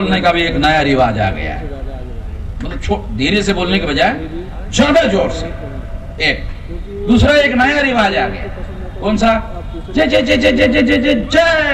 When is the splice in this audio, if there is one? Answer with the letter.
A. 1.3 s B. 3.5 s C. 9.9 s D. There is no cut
D